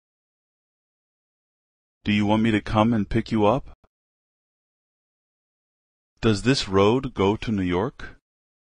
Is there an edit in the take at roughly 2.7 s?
yes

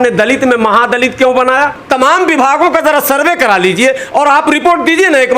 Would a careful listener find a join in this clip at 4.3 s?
no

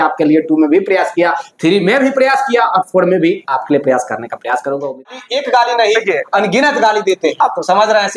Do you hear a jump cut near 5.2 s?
yes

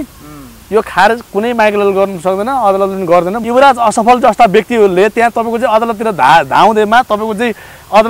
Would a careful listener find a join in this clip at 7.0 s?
no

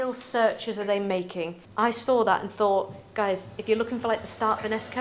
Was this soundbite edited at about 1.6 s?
yes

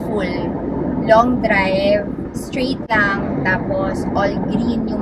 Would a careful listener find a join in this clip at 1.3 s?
no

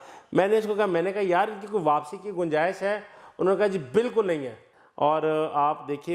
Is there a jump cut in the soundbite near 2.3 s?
no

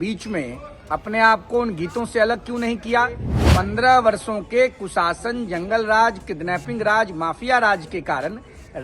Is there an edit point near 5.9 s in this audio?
no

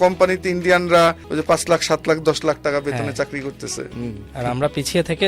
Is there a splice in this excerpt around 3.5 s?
no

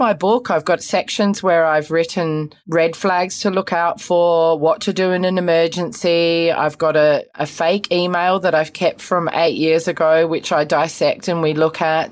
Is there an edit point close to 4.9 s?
no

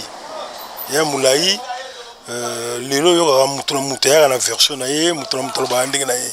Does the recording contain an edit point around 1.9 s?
no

